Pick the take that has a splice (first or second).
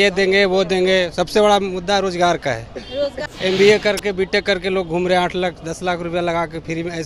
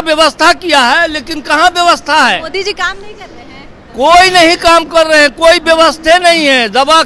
first